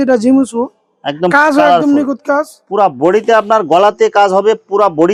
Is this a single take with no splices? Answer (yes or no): yes